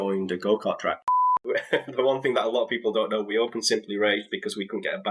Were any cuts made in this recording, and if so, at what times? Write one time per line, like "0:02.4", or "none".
0:01.3